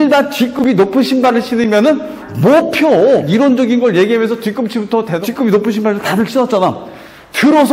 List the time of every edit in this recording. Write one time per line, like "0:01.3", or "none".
0:03.3
0:05.2